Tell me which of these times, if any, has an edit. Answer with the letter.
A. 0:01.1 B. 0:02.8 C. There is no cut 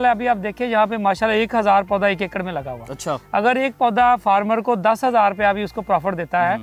C